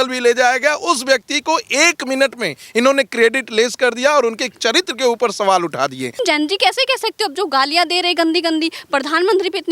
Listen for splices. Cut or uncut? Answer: cut